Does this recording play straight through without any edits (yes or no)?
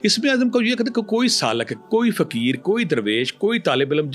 yes